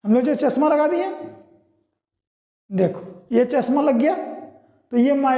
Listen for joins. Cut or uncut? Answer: uncut